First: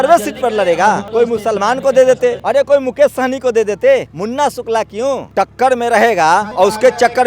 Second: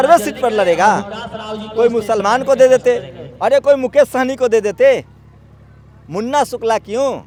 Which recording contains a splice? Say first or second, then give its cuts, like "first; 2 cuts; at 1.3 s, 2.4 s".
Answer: first; 5 cuts; at 1.0 s, 2.4 s, 4.1 s, 5.3 s, 6.5 s